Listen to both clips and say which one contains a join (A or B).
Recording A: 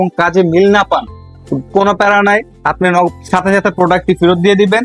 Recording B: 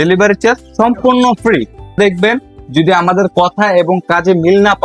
B